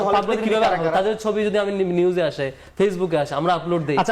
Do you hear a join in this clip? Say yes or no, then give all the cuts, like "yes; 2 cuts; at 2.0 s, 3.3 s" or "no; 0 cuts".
no; 0 cuts